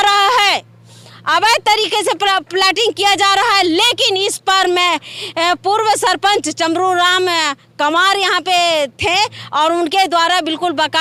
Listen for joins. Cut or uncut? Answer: uncut